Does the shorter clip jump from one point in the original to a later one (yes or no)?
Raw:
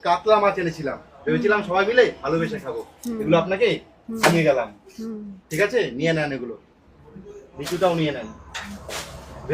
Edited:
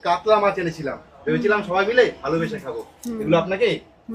no